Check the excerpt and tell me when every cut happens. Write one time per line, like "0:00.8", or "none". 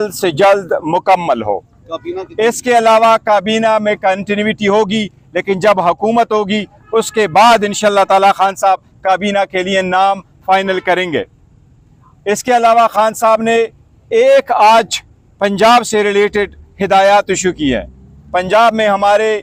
none